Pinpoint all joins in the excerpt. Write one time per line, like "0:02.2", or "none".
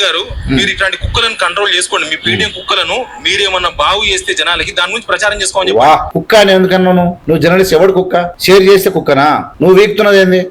0:06.1
0:07.2
0:08.3
0:09.5